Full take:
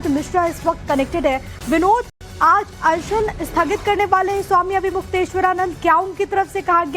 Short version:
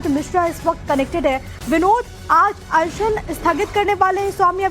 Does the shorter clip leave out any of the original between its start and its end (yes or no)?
yes